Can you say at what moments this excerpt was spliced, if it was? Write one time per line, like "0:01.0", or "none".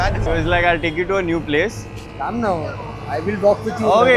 0:02.2